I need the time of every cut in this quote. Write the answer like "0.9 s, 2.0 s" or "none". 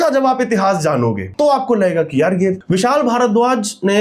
1.2 s, 2.6 s